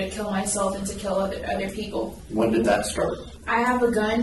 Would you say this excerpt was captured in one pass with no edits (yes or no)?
no